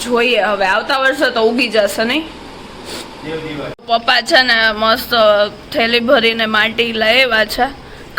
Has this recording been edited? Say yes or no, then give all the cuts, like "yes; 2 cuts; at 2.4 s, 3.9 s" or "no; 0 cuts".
yes; 1 cut; at 3.8 s